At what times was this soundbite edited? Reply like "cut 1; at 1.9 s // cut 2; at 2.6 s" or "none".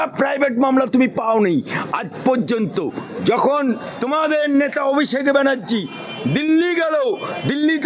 none